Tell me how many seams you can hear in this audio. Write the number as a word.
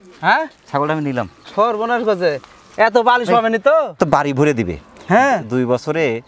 one